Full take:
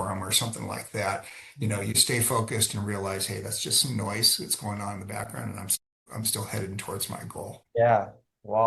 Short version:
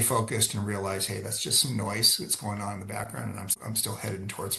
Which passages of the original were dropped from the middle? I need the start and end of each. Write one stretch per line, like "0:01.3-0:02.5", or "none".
0:05.7-0:06.0